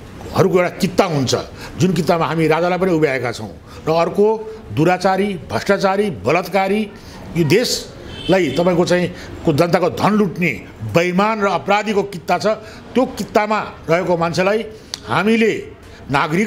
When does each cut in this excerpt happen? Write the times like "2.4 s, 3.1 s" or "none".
none